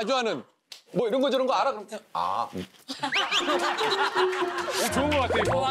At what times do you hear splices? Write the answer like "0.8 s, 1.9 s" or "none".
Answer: none